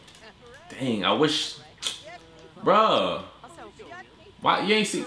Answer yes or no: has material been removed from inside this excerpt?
no